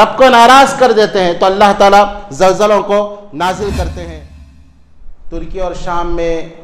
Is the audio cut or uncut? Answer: cut